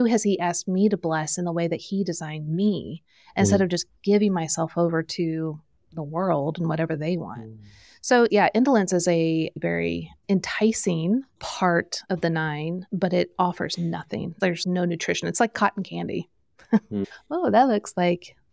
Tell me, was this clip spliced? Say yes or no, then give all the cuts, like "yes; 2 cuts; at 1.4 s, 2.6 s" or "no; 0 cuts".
yes; 3 cuts; at 8.3 s, 12.0 s, 12.8 s